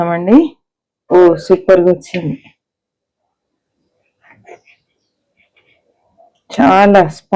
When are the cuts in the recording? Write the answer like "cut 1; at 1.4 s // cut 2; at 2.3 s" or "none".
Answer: cut 1; at 1.0 s